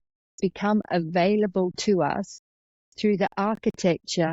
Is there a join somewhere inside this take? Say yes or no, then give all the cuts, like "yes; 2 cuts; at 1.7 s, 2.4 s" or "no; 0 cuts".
no; 0 cuts